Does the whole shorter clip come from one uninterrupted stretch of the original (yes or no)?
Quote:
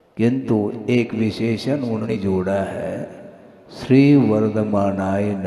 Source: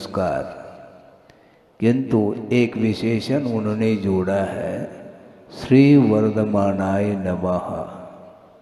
no